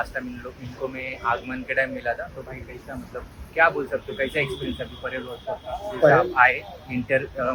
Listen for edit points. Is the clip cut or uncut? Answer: uncut